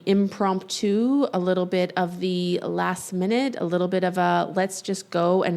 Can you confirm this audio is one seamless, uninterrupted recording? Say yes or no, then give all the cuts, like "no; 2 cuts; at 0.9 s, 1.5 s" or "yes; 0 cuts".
yes; 0 cuts